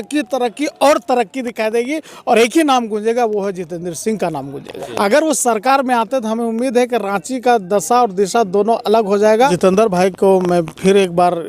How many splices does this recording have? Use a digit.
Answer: 2